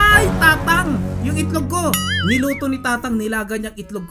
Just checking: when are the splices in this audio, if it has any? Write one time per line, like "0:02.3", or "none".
none